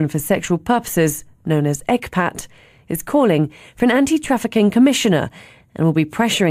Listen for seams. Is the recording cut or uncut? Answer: uncut